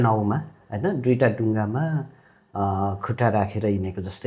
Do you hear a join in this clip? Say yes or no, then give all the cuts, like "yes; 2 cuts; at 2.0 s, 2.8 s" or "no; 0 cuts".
no; 0 cuts